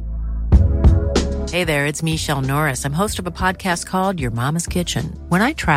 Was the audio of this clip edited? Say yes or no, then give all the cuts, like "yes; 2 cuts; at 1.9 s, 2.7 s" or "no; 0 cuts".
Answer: no; 0 cuts